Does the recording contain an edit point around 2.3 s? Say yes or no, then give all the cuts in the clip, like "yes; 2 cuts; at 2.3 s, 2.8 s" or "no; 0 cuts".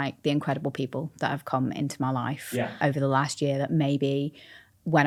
no; 0 cuts